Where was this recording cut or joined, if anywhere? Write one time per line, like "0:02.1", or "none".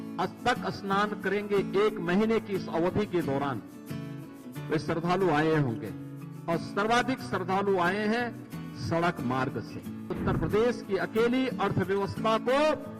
0:10.2

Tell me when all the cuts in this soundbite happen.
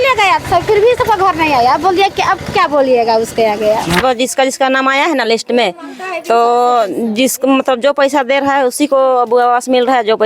0:04.0

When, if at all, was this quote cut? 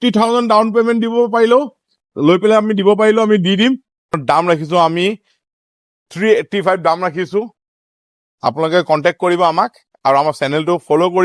0:04.1

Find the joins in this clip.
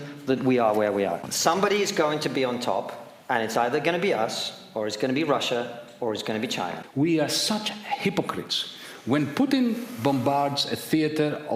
0:01.3
0:06.8

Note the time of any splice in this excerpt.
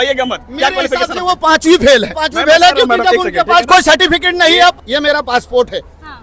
0:02.2
0:04.8

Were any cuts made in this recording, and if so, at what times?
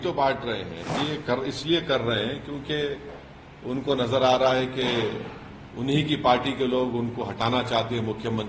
0:01.0

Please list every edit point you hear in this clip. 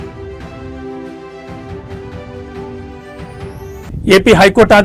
none

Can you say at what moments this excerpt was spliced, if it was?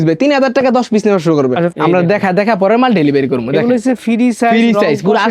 0:01.7

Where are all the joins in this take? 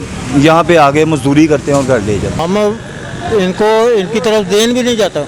0:02.4

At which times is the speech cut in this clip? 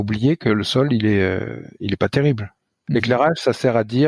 0:02.8

